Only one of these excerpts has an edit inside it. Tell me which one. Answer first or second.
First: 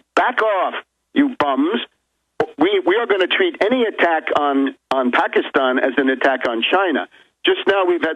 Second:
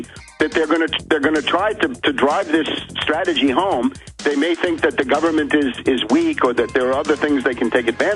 first